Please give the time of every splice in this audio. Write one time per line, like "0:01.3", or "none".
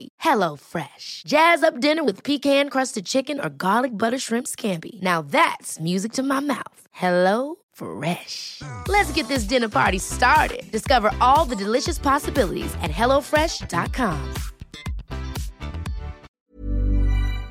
0:16.3